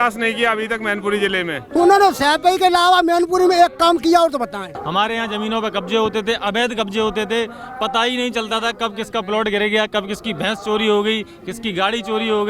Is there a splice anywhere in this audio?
yes; 2 cuts; at 1.7 s, 4.8 s

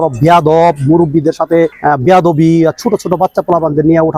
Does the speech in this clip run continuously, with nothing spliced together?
yes; 0 cuts

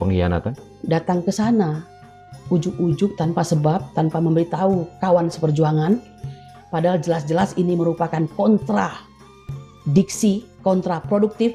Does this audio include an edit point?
no; 0 cuts

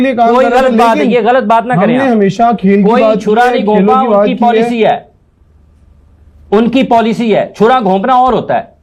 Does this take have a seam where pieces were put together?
no; 0 cuts

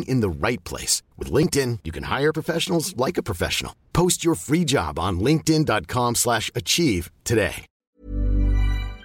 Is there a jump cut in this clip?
yes; 1 cut; at 7.7 s

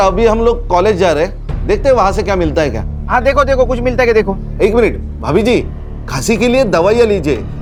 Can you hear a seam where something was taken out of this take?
no; 0 cuts

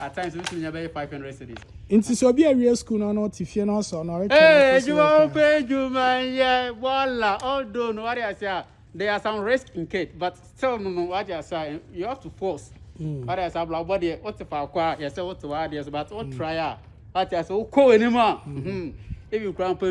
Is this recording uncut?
no; 1 cut; at 1.5 s

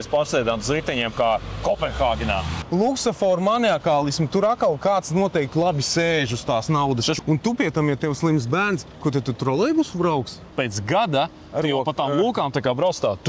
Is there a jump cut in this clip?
yes; 3 cuts; at 2.6 s, 7.2 s, 10.5 s

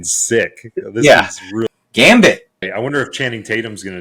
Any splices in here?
yes; 2 cuts; at 1.7 s, 2.7 s

